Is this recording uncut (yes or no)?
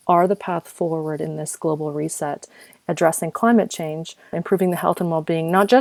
no